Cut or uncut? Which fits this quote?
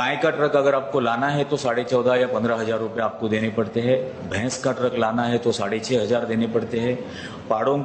uncut